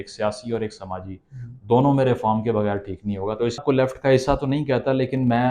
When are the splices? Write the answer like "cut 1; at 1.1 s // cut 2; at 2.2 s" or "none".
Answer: cut 1; at 3.6 s